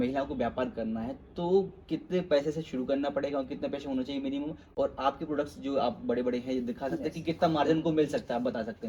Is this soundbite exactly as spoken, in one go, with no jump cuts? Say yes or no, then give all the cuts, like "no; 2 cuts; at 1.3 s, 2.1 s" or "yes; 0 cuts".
yes; 0 cuts